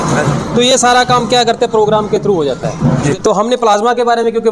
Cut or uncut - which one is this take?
cut